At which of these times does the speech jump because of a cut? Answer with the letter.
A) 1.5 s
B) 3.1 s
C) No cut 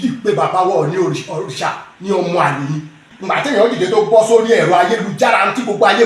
B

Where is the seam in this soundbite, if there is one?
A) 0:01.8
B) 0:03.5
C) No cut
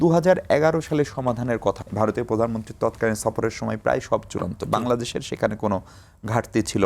A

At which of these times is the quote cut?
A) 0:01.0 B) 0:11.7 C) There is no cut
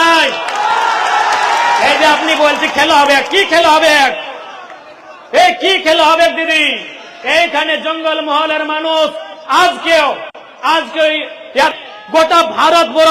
B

